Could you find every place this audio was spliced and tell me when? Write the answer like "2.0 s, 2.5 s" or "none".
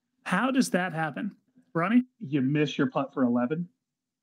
2.1 s